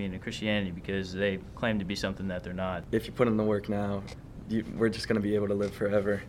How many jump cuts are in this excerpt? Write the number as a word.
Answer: one